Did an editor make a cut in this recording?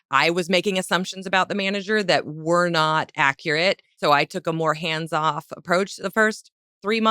yes; 1 cut; at 3.9 s

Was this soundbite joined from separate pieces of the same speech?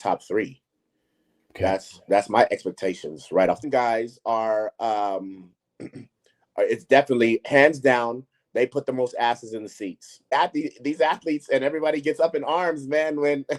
yes; 2 cuts; at 3.7 s, 10.3 s

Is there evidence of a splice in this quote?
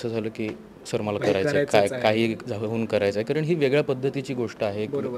no; 0 cuts

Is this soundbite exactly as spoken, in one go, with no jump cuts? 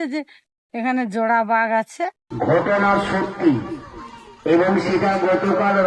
no; 1 cut; at 2.2 s

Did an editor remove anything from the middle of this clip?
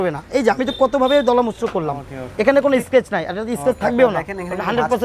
no; 0 cuts

